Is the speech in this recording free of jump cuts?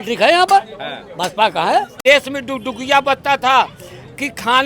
no; 1 cut; at 2.0 s

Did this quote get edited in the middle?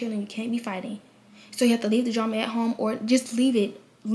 no; 0 cuts

